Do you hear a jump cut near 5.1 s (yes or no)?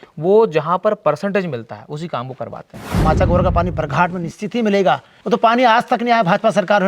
yes